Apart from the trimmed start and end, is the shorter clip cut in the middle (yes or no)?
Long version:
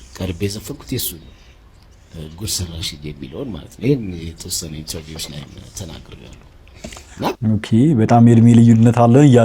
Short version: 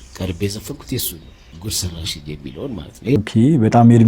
yes